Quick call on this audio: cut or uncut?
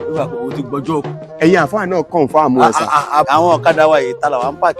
cut